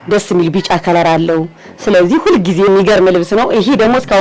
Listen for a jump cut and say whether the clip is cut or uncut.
cut